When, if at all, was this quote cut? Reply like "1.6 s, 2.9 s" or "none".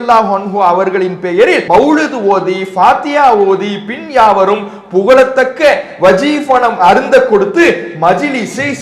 1.6 s

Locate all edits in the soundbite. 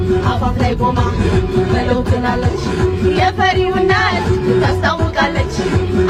none

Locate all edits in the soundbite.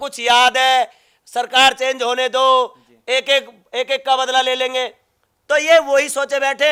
none

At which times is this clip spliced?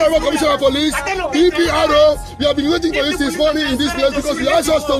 none

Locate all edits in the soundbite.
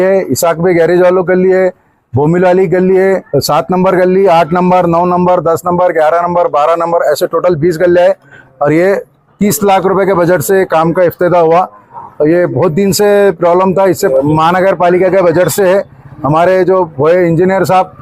3.3 s, 14.1 s

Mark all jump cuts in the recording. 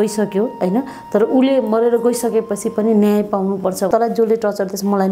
3.9 s

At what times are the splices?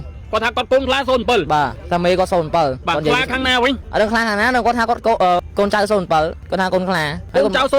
1.8 s, 2.8 s, 3.8 s, 5.4 s, 6.7 s

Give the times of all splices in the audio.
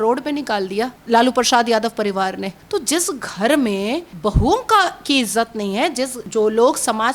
1.0 s, 2.5 s, 4.1 s, 6.2 s

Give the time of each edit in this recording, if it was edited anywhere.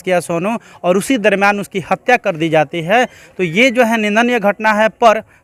none

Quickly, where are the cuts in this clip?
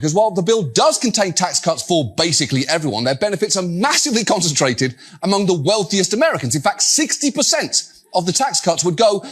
none

